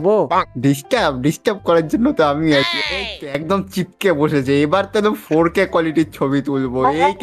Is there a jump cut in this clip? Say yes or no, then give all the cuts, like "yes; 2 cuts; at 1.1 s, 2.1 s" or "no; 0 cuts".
yes; 1 cut; at 2.7 s